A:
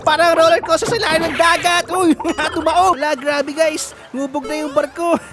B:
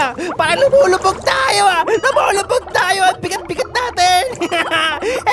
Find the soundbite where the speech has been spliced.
A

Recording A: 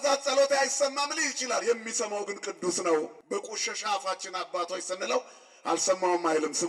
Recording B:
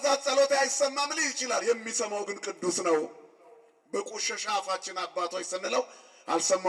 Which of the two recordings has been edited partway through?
A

